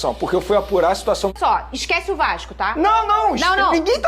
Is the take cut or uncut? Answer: cut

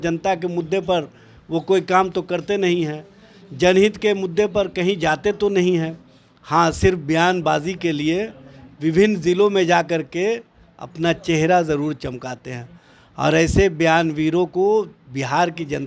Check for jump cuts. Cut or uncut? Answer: uncut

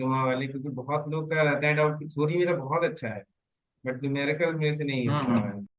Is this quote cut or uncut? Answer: uncut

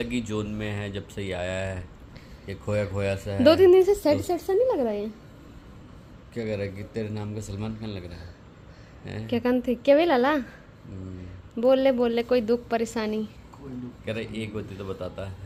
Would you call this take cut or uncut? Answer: uncut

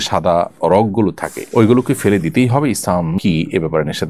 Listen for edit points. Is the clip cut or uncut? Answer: uncut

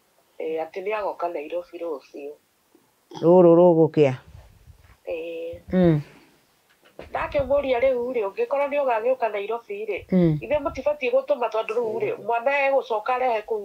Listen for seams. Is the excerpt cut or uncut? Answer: uncut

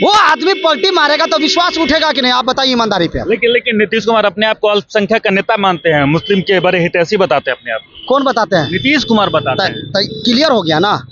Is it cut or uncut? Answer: uncut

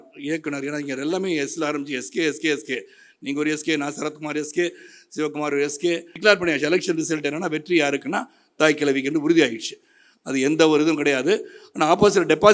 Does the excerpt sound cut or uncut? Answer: cut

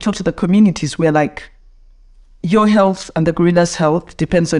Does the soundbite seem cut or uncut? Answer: uncut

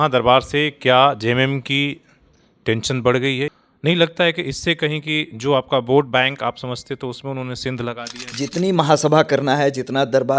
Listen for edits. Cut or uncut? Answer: cut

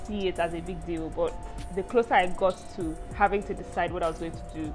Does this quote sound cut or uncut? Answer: uncut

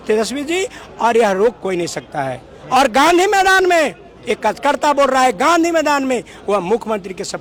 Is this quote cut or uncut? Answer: uncut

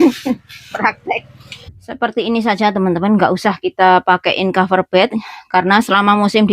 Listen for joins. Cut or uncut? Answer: cut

